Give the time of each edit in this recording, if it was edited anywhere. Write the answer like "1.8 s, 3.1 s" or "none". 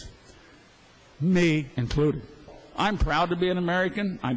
2.6 s